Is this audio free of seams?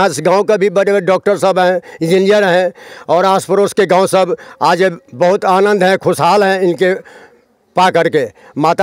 yes; 0 cuts

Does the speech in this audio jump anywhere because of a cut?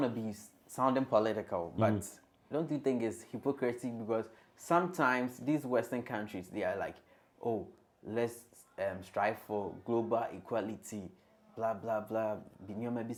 no; 0 cuts

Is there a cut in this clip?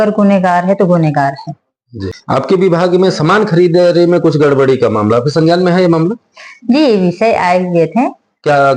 yes; 1 cut; at 2.0 s

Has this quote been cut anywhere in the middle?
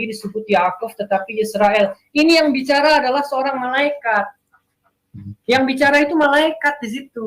no; 0 cuts

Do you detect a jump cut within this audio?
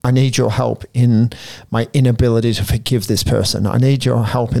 no; 0 cuts

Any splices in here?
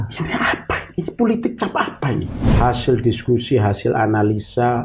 yes; 1 cut; at 2.4 s

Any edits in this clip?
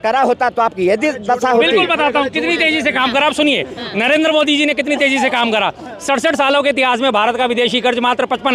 no; 0 cuts

